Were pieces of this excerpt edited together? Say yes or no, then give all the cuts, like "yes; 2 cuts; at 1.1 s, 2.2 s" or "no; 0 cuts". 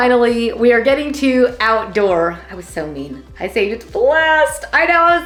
no; 0 cuts